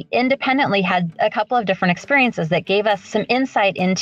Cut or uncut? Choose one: cut